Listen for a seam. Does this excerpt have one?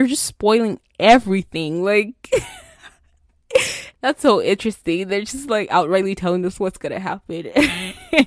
yes; 1 cut; at 3.8 s

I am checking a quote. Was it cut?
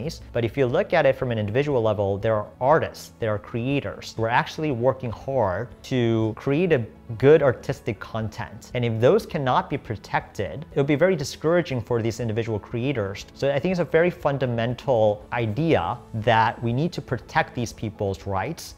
yes; 5 cuts; at 4.1 s, 6.0 s, 10.6 s, 13.2 s, 16.0 s

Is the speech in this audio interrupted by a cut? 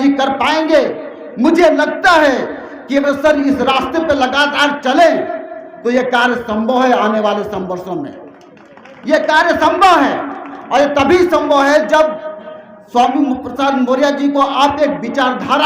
no; 0 cuts

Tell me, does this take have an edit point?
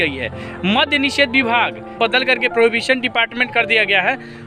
yes; 1 cut; at 1.9 s

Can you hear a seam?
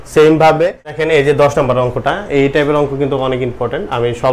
yes; 1 cut; at 1.0 s

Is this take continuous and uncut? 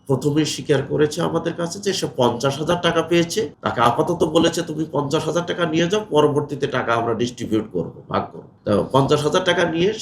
no; 2 cuts; at 3.6 s, 8.4 s

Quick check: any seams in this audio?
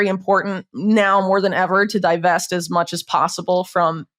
no; 0 cuts

